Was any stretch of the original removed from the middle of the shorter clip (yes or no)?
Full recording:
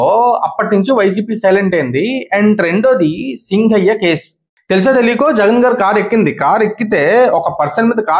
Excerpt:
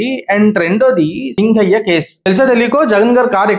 yes